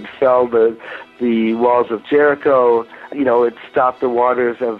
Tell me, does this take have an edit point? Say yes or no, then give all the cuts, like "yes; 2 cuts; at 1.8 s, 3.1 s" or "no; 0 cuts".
yes; 1 cut; at 3.1 s